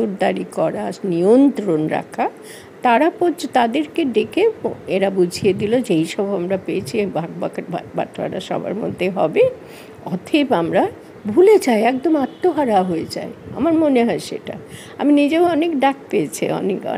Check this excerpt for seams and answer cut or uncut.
uncut